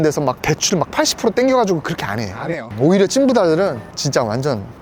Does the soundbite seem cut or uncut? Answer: cut